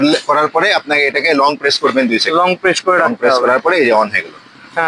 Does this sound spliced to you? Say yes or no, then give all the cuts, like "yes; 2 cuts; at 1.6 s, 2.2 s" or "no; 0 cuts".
no; 0 cuts